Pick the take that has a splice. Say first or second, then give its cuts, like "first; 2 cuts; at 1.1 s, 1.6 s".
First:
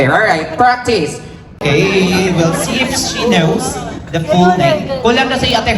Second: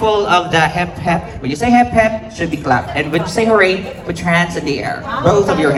first; 1 cut; at 1.6 s